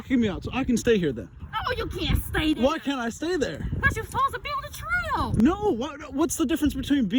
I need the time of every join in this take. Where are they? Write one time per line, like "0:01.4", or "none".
none